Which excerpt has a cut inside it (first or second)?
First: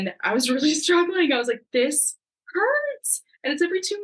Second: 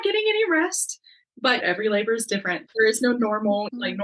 second